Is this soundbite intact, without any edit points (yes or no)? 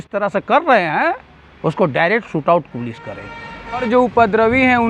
no